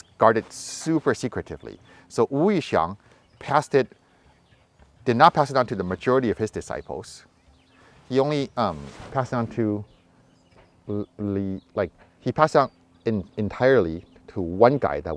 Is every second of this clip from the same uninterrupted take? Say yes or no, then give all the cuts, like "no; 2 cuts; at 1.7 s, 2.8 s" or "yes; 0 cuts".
yes; 0 cuts